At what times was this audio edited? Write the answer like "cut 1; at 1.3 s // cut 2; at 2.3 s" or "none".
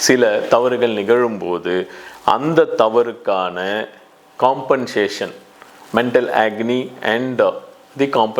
none